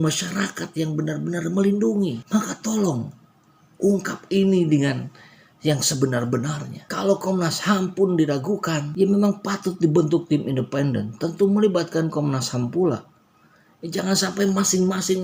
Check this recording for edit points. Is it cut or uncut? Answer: uncut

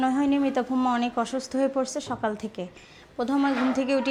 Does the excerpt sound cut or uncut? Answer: uncut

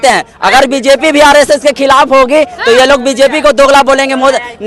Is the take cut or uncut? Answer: uncut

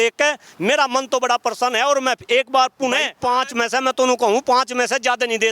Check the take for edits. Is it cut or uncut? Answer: cut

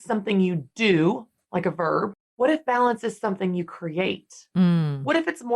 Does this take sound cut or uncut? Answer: cut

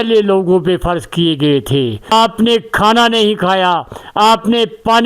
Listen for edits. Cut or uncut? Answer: cut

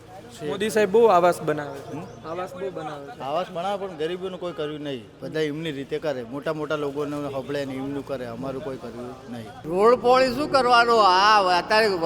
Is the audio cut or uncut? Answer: cut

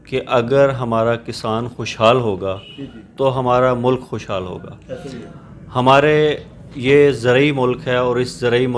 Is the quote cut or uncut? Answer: uncut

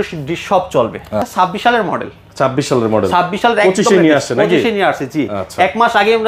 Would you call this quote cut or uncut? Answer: cut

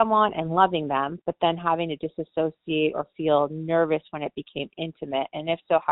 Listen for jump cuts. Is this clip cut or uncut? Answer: uncut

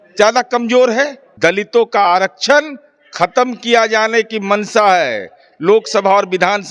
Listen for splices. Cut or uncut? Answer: cut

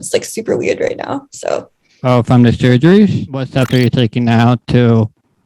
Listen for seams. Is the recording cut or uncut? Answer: cut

